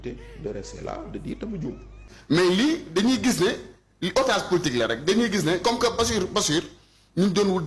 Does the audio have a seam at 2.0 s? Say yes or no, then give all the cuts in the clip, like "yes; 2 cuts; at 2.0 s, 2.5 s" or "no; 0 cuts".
yes; 1 cut; at 2.0 s